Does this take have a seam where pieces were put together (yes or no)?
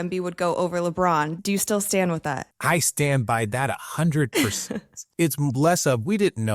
yes